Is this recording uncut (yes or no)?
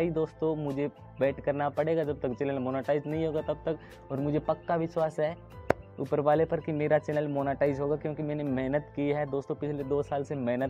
yes